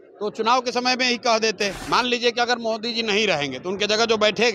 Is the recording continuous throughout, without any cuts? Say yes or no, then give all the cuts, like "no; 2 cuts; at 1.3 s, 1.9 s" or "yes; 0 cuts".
no; 1 cut; at 1.8 s